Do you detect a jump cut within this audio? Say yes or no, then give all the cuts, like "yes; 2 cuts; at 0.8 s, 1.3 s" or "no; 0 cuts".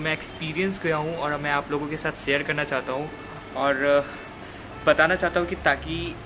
no; 0 cuts